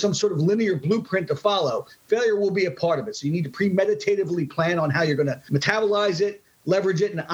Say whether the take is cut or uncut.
cut